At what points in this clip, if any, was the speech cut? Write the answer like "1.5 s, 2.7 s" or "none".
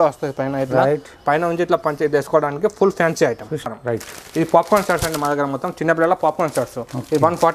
3.6 s